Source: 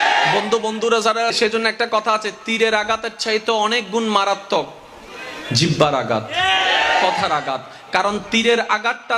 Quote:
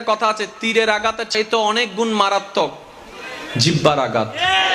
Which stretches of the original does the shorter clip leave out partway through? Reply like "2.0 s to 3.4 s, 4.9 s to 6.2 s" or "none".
3.1 s to 3.2 s